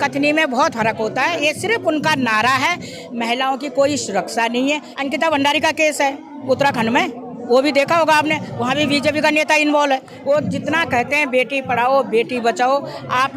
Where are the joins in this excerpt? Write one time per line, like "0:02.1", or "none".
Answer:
0:04.9
0:10.1